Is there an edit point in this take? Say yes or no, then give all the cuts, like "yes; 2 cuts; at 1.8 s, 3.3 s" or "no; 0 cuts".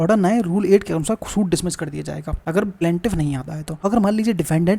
yes; 2 cuts; at 2.6 s, 3.6 s